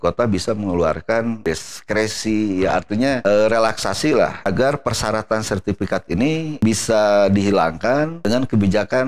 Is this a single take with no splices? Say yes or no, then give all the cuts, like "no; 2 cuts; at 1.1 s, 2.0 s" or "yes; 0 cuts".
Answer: no; 5 cuts; at 1.4 s, 3.2 s, 4.4 s, 6.6 s, 8.2 s